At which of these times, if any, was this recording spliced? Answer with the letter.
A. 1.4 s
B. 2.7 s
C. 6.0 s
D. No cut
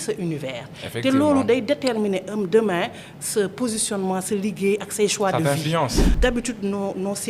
C